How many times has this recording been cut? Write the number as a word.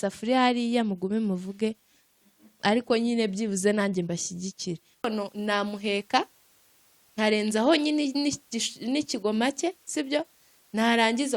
one